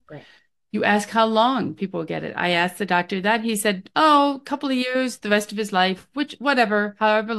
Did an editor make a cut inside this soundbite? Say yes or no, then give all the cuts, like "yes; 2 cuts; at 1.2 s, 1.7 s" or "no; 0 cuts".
no; 0 cuts